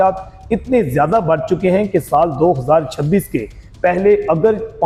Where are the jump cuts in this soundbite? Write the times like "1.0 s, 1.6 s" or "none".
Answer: none